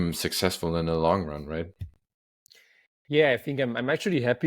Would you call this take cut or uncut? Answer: uncut